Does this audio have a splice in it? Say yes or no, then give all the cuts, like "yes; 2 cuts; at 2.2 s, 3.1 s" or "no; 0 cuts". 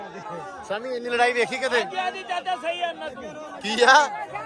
no; 0 cuts